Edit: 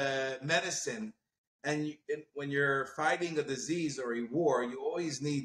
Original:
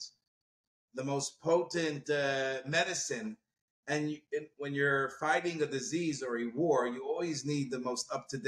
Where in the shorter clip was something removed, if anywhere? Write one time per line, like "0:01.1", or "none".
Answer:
none